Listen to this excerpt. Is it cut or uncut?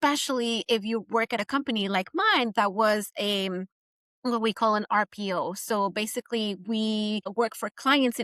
cut